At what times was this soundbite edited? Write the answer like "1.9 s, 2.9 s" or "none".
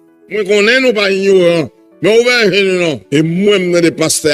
3.0 s